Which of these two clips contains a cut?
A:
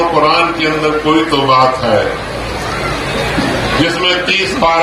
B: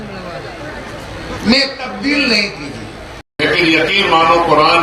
B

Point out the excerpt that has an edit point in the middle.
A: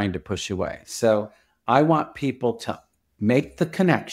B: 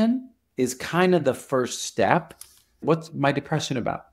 B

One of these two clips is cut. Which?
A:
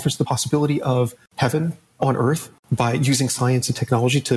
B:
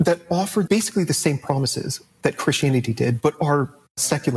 A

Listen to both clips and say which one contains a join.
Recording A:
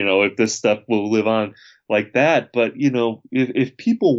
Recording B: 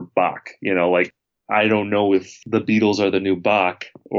B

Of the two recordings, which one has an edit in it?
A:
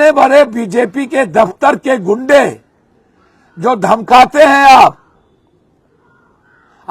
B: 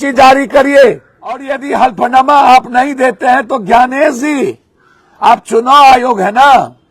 B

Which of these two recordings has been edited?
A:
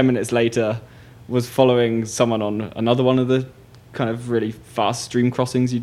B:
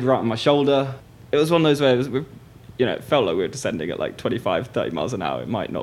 B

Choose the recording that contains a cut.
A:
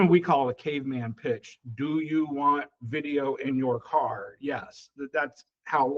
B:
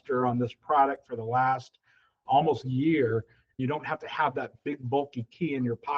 B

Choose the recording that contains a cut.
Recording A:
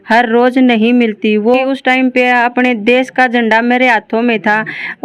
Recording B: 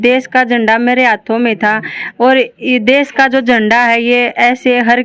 A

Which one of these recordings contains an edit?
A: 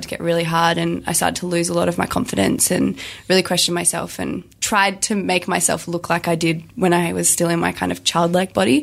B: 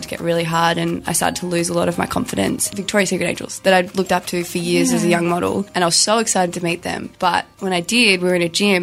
B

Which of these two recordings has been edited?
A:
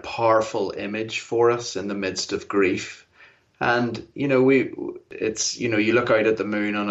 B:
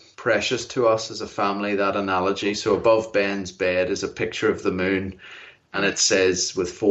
A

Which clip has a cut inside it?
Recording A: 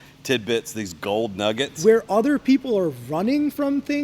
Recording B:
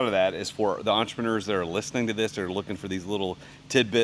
A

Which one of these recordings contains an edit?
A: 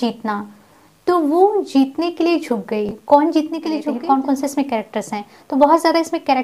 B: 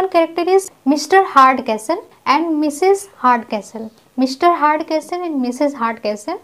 A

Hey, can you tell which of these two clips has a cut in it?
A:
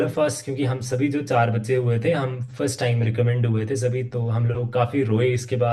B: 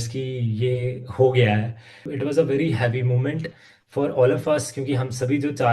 B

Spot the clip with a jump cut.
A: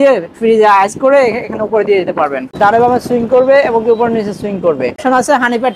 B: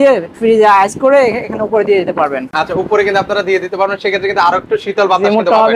A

